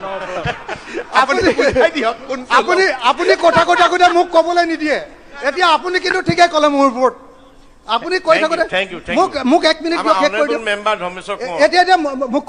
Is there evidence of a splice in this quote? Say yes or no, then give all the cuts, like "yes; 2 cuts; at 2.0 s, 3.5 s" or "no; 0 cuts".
no; 0 cuts